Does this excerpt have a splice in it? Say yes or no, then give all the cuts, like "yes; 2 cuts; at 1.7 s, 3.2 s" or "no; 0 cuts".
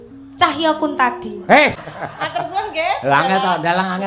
yes; 1 cut; at 1.9 s